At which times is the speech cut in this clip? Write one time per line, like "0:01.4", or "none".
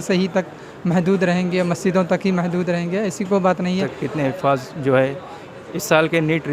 0:04.0